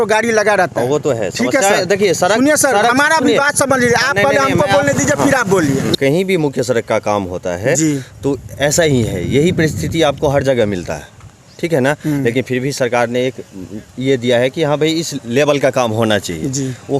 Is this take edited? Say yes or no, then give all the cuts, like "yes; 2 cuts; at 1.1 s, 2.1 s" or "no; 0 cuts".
yes; 1 cut; at 5.9 s